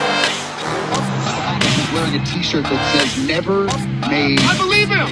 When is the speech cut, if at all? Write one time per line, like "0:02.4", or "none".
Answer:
none